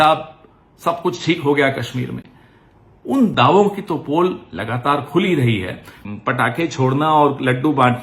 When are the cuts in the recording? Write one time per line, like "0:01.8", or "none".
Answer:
0:05.9

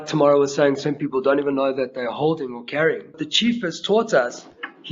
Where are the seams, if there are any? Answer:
0:03.3

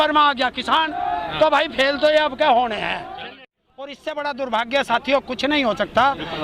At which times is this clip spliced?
0:03.2

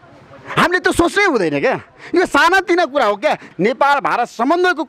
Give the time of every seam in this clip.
0:03.5

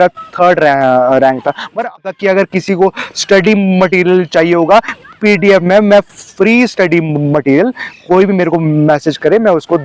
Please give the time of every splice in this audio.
0:01.9

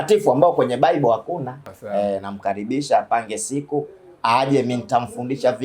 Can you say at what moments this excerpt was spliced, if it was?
0:01.8

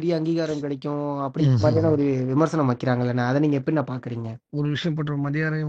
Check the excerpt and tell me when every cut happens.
0:04.5

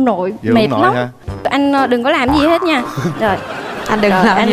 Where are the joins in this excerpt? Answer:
0:01.2

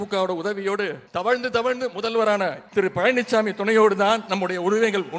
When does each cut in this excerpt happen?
0:01.0
0:02.6

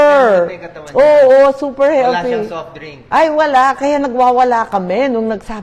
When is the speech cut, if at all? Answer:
none

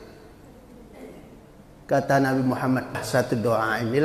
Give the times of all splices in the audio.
0:03.0

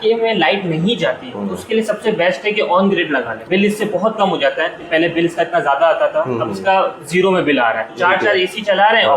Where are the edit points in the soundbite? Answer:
0:03.4
0:04.8
0:07.9

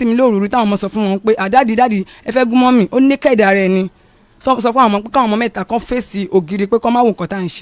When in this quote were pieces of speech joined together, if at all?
none

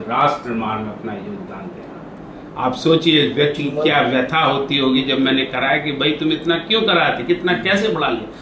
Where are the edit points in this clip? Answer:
0:02.2

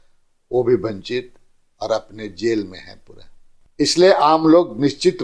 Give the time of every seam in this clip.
0:03.6

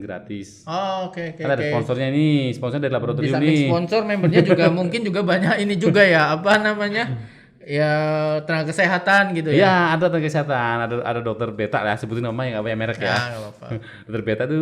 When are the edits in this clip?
none

